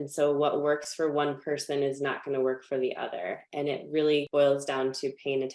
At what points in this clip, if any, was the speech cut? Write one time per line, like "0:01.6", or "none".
0:04.3